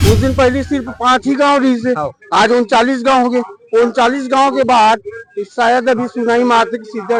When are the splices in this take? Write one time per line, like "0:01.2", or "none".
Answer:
none